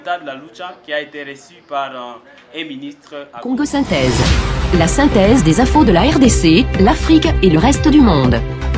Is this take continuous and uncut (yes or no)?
no